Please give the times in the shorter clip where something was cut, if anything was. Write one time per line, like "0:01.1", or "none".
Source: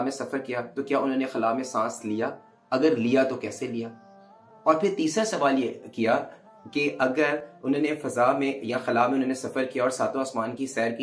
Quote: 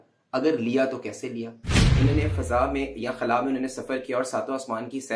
0:01.9